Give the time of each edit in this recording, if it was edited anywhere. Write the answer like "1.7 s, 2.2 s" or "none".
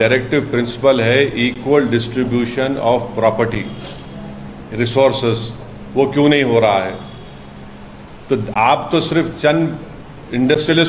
none